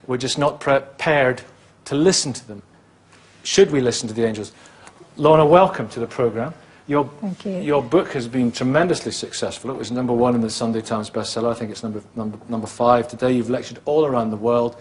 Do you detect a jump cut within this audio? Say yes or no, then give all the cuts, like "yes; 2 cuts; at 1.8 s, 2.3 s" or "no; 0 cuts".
yes; 1 cut; at 9.7 s